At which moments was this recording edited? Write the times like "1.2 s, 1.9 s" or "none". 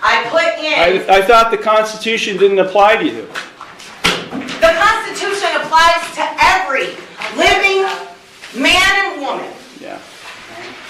none